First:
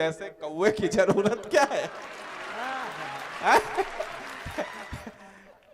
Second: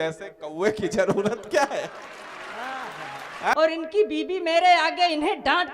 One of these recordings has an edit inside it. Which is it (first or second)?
second